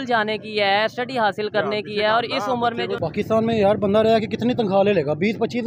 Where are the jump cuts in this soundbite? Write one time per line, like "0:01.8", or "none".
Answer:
0:03.0